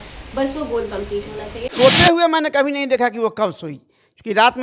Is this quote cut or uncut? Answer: cut